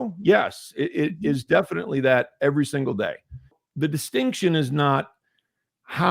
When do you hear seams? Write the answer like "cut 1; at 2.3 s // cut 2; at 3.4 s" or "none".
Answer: cut 1; at 3.6 s